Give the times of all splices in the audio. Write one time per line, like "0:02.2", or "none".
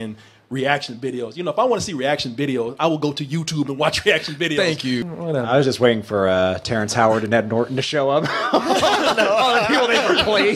0:05.0

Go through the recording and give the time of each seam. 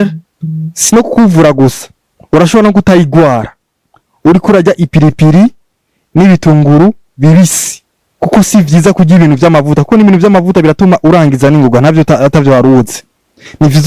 none

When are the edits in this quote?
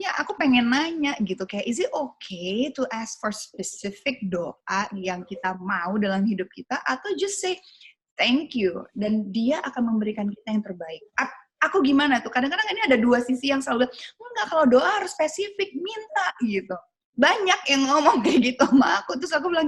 none

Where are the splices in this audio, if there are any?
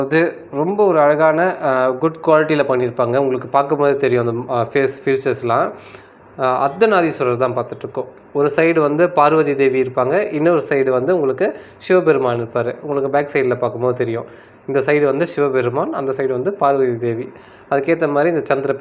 none

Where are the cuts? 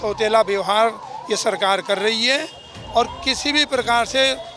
none

